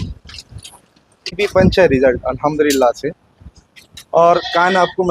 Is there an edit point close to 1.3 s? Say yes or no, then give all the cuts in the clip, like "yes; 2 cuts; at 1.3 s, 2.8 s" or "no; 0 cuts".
yes; 1 cut; at 1.3 s